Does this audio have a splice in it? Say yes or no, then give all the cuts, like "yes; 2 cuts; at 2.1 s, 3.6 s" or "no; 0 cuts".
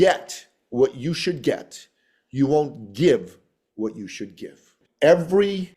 yes; 1 cut; at 4.8 s